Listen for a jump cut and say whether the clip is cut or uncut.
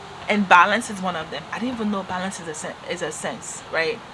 uncut